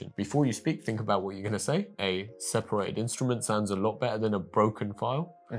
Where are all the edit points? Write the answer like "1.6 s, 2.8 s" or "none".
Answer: 1.9 s